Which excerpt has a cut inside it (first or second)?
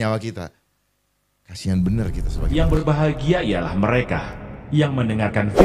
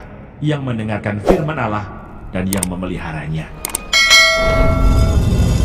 first